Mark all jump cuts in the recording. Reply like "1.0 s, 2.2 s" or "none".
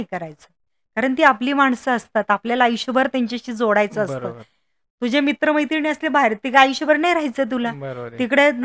none